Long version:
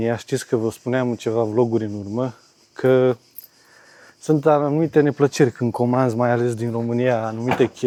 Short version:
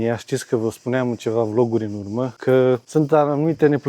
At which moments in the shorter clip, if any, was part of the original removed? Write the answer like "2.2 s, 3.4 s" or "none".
2.3 s, 2.8 s